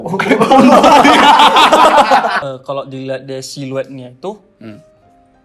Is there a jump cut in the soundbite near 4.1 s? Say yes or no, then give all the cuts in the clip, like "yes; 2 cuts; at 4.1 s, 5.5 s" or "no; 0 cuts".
no; 1 cut; at 2.4 s